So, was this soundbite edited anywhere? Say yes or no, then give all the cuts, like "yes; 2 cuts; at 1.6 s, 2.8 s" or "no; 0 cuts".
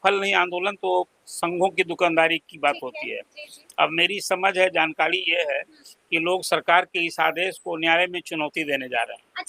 no; 0 cuts